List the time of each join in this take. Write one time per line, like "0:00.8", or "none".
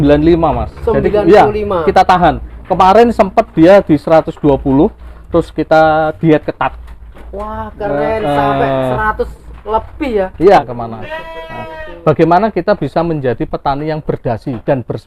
0:10.7